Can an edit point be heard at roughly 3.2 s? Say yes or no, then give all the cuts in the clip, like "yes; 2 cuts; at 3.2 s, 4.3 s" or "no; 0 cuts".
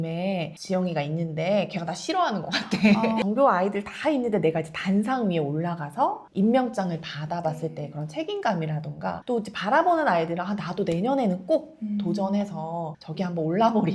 yes; 1 cut; at 3.2 s